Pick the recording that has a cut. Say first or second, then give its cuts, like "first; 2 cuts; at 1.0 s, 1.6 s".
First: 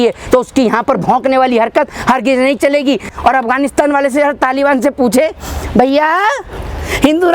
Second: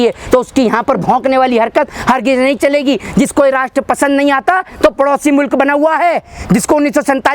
first; 1 cut; at 3.1 s